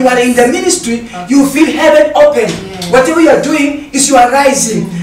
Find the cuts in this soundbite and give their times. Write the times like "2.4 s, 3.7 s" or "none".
none